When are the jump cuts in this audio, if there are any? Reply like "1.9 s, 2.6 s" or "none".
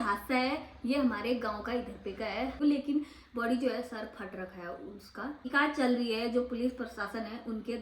2.5 s, 5.5 s